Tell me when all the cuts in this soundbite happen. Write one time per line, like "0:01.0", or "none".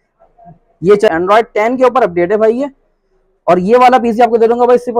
0:01.1